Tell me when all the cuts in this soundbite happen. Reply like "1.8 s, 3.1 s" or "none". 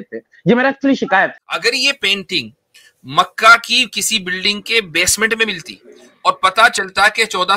1.4 s